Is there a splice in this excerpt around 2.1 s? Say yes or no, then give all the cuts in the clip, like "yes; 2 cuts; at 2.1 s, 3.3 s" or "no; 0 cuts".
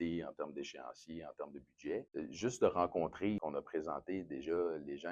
yes; 2 cuts; at 2.1 s, 3.4 s